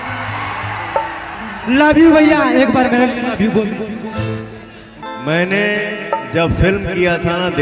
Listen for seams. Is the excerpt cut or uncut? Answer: cut